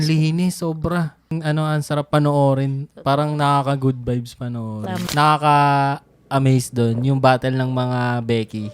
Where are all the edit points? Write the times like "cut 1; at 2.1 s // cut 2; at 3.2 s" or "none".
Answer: cut 1; at 1.3 s // cut 2; at 5.0 s

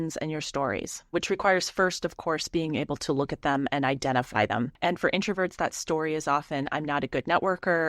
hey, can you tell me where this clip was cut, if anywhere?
cut 1; at 1.1 s // cut 2; at 4.7 s

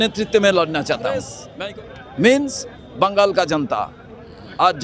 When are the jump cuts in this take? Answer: cut 1; at 1.4 s

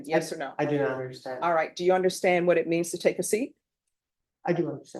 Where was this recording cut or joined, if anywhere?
none

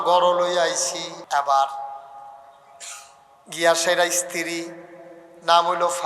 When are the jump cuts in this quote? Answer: cut 1; at 1.1 s

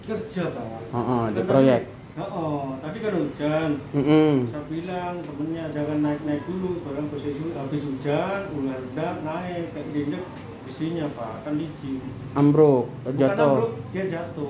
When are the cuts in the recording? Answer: none

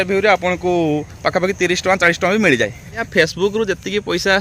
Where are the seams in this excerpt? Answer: cut 1; at 3.1 s

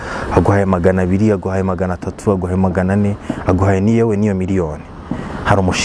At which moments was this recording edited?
none

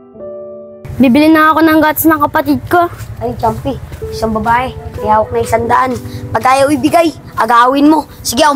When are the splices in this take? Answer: cut 1; at 1.0 s

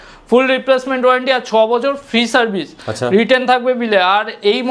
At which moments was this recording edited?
none

